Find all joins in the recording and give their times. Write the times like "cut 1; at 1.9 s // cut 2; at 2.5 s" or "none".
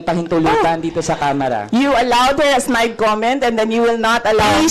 none